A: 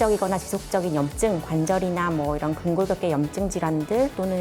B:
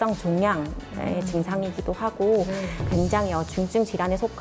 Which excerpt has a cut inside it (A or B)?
B